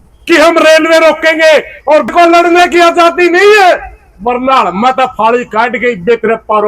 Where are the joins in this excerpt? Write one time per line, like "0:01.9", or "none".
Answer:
0:02.1